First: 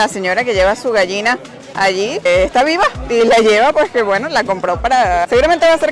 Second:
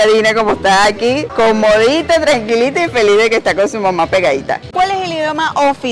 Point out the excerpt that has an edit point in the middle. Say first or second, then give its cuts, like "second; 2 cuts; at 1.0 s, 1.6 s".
second; 2 cuts; at 1.3 s, 4.7 s